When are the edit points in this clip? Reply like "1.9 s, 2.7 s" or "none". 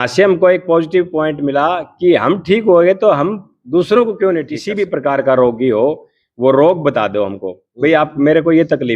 4.7 s